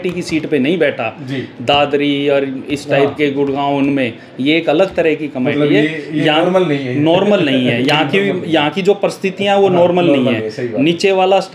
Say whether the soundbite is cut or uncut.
uncut